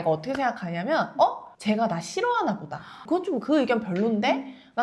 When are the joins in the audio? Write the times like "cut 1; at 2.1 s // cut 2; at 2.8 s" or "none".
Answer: cut 1; at 3.0 s